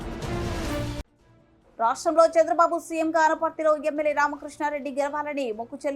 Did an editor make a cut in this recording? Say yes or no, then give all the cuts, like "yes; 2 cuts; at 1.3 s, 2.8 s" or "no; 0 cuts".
yes; 1 cut; at 0.9 s